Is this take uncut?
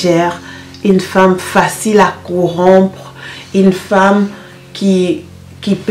yes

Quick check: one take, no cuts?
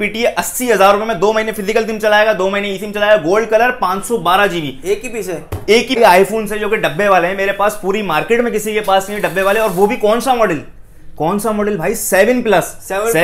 no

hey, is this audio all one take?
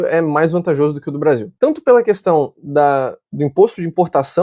no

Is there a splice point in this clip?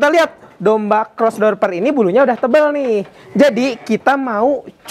no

